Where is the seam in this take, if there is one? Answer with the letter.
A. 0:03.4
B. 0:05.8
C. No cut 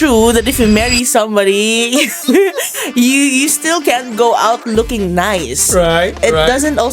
C